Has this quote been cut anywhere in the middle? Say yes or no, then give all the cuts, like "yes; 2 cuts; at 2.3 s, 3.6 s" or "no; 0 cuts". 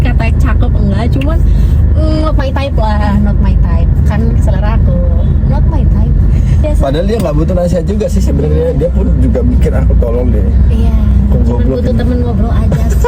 yes; 1 cut; at 6.6 s